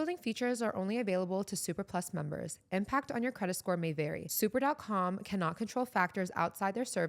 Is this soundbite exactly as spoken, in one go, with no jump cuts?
yes; 0 cuts

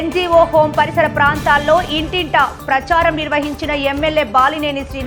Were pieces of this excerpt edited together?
no; 0 cuts

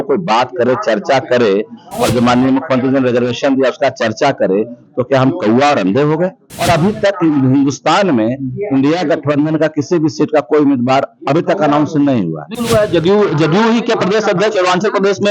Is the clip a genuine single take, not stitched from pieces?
no; 2 cuts; at 6.5 s, 12.5 s

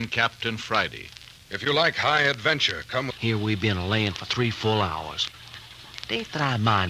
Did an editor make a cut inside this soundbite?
no; 0 cuts

